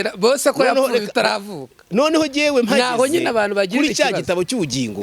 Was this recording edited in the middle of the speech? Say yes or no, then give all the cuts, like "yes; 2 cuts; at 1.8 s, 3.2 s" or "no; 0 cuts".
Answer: no; 0 cuts